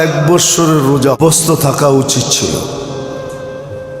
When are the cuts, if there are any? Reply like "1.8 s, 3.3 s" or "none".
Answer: 1.2 s